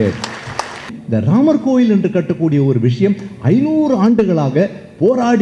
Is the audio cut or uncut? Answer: cut